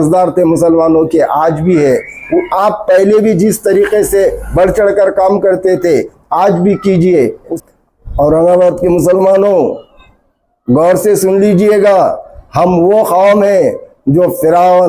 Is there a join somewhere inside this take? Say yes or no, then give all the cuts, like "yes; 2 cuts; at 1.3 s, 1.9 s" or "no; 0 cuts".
yes; 1 cut; at 7.6 s